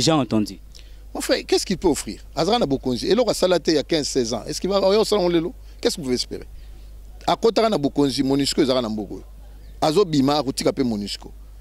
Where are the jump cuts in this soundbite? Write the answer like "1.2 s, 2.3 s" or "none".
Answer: none